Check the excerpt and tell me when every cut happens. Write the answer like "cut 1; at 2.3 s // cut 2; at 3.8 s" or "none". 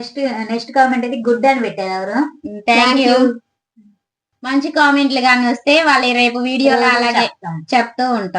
cut 1; at 4.1 s